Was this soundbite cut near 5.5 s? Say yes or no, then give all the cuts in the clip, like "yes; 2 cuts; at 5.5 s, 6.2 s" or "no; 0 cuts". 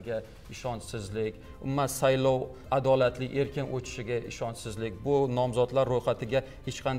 no; 1 cut; at 2.6 s